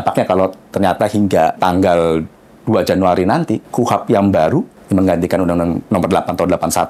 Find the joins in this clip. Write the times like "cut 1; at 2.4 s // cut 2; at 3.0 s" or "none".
cut 1; at 1.6 s